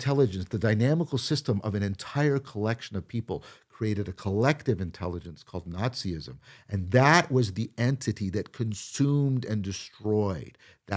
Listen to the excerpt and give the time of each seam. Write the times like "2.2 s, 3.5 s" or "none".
none